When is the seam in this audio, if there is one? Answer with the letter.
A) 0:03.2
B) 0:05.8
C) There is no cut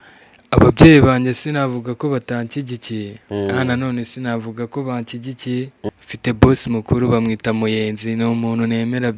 B